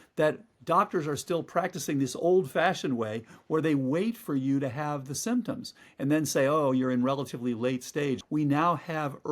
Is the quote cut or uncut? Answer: cut